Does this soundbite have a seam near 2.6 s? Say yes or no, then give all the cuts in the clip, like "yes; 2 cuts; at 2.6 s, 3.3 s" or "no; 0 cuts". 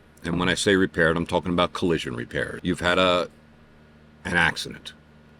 yes; 1 cut; at 2.6 s